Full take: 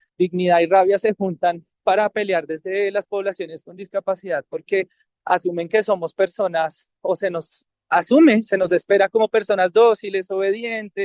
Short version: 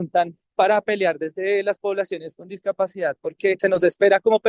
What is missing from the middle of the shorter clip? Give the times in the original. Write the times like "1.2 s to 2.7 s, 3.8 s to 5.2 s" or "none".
4.9 s to 8.5 s